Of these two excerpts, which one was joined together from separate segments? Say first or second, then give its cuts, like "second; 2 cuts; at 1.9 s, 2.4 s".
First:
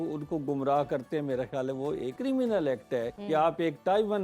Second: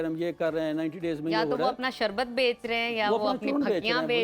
first; 2 cuts; at 2.1 s, 3.2 s